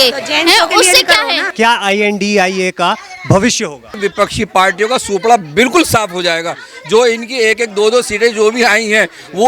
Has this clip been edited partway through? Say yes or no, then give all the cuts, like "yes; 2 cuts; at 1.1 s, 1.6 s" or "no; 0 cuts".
yes; 2 cuts; at 1.5 s, 4.0 s